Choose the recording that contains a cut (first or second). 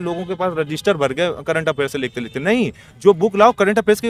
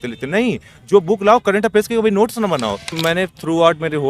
second